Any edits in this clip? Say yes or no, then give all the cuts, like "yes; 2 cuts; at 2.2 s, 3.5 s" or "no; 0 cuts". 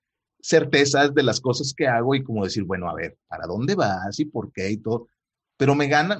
no; 0 cuts